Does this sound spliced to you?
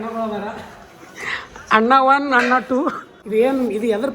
yes; 1 cut; at 3.2 s

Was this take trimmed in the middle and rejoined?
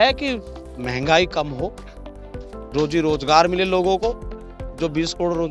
no; 0 cuts

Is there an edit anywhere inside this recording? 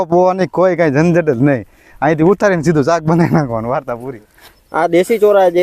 yes; 1 cut; at 3.9 s

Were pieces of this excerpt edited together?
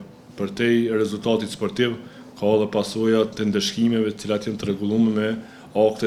no; 0 cuts

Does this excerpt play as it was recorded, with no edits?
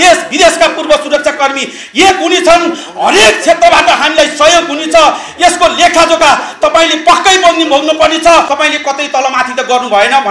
no; 1 cut; at 8.5 s

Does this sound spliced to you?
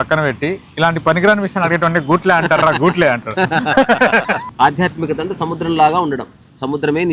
yes; 1 cut; at 4.5 s

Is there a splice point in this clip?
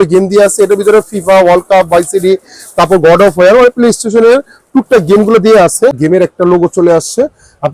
yes; 1 cut; at 6.0 s

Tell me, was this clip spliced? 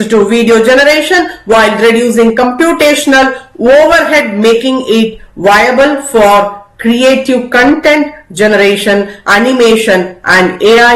no; 0 cuts

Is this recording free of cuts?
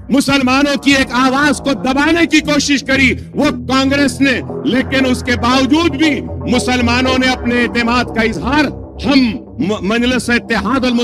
no; 1 cut; at 3.6 s

